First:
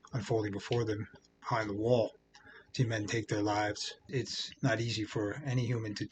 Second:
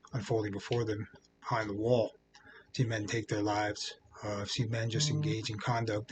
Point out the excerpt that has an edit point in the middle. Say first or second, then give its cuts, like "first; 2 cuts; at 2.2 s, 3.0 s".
first; 1 cut; at 4.1 s